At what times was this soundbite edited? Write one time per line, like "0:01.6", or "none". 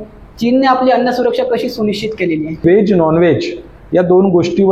0:02.6